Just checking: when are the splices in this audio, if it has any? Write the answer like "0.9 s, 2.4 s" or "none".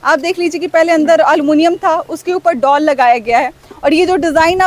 none